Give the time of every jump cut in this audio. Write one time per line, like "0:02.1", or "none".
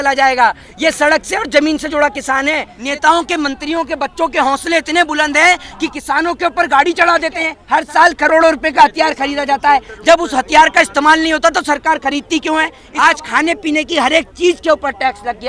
0:02.7
0:07.6
0:12.8